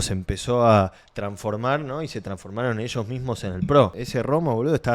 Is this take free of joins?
no; 1 cut; at 4.0 s

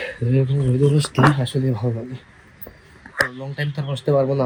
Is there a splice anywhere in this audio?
no; 0 cuts

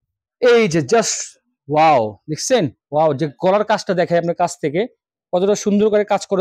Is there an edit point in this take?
no; 0 cuts

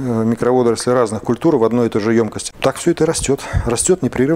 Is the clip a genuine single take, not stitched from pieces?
no; 1 cut; at 2.4 s

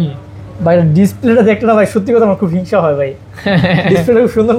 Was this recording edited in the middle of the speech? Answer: no; 0 cuts

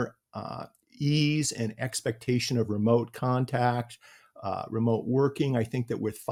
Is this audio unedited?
yes; 0 cuts

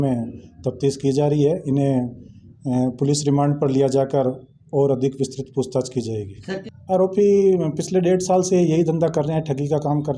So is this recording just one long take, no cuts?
no; 1 cut; at 6.6 s

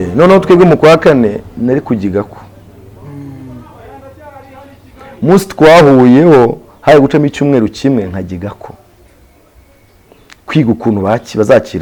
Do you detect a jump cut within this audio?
no; 0 cuts

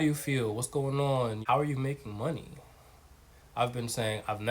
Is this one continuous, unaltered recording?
no; 1 cut; at 1.4 s

